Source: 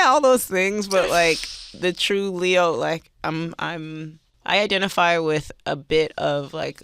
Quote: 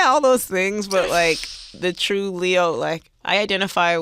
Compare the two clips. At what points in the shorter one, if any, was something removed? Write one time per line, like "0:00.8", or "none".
0:03.1